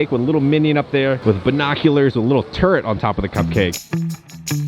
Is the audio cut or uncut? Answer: uncut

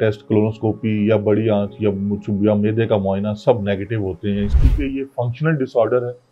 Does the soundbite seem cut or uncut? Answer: cut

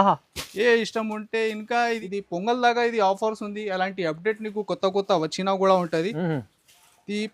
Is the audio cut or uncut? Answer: cut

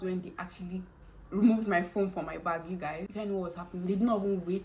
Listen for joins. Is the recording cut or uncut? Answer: cut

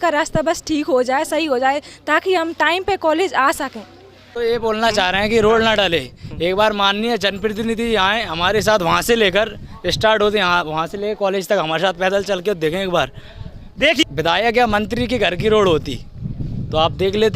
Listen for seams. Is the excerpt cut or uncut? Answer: cut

